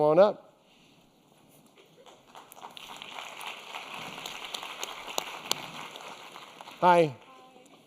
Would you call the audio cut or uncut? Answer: cut